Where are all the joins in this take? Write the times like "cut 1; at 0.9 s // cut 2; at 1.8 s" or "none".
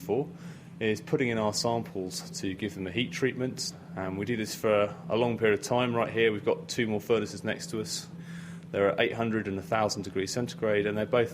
cut 1; at 3.7 s // cut 2; at 8.2 s